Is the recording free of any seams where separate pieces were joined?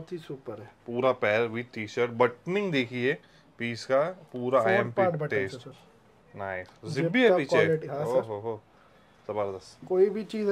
yes; 0 cuts

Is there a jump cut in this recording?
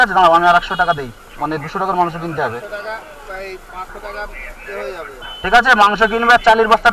no; 0 cuts

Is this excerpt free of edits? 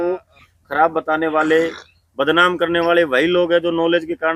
yes; 0 cuts

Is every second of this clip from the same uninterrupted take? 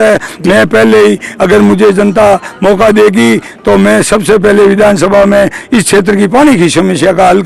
yes; 0 cuts

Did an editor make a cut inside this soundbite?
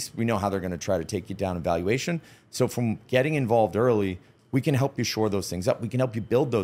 no; 0 cuts

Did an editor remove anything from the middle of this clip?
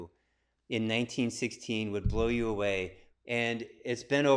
yes; 1 cut; at 3.0 s

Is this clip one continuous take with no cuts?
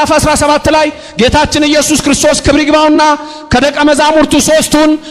yes; 0 cuts

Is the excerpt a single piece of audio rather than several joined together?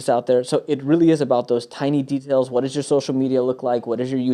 yes; 0 cuts

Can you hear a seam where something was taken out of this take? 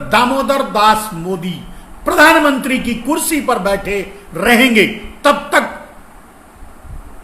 no; 0 cuts

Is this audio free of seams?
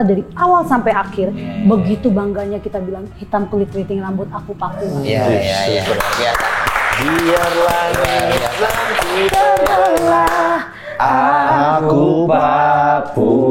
yes; 0 cuts

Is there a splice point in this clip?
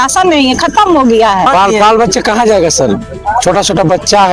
yes; 1 cut; at 1.5 s

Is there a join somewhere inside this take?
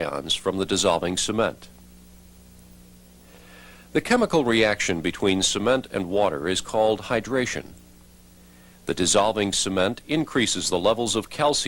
yes; 1 cut; at 5.9 s

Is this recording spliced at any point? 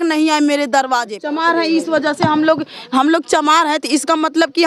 yes; 1 cut; at 1.2 s

